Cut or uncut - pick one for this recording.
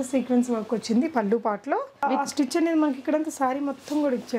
cut